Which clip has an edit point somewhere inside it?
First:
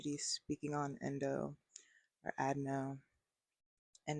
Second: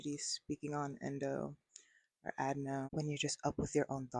second; 1 cut; at 2.9 s

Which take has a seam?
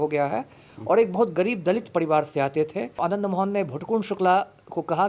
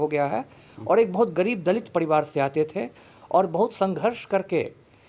first; 1 cut; at 2.9 s

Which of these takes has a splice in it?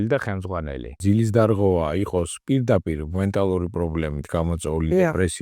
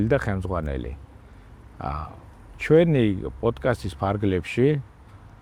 first; 1 cut; at 1.0 s

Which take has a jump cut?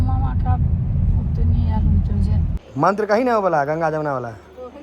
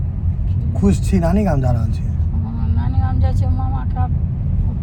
first; 1 cut; at 2.6 s

